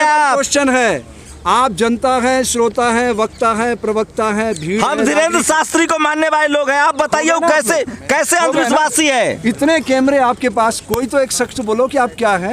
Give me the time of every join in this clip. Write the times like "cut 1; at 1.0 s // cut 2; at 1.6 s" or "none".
none